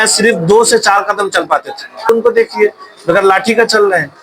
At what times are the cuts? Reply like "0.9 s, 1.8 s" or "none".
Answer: 2.1 s